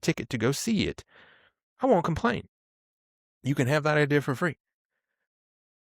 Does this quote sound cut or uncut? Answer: uncut